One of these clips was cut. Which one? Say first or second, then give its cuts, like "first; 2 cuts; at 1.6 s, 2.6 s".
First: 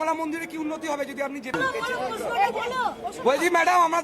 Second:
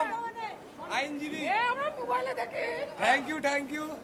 first; 1 cut; at 1.5 s